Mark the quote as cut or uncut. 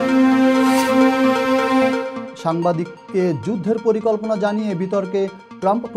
uncut